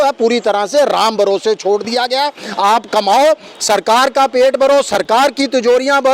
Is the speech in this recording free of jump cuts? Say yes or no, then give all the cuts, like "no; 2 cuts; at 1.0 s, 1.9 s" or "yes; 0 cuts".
yes; 0 cuts